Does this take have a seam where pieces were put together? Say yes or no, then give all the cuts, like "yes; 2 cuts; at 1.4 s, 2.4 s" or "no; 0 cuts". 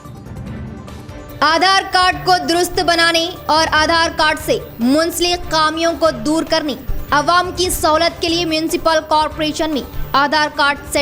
yes; 1 cut; at 1.3 s